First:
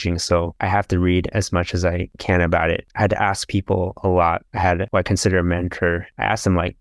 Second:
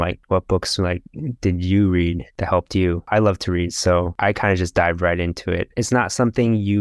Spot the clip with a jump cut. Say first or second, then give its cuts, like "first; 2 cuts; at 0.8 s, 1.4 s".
second; 2 cuts; at 3.0 s, 5.7 s